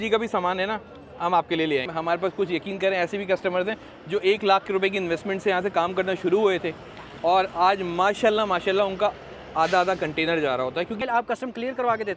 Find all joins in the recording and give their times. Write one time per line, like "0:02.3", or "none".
0:01.8
0:11.0